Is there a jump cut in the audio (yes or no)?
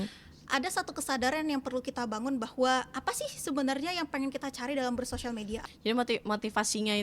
yes